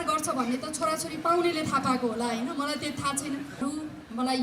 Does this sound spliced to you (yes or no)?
yes